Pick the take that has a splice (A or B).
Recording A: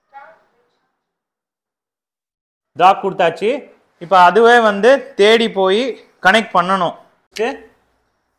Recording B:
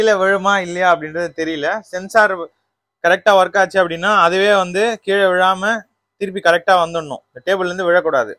A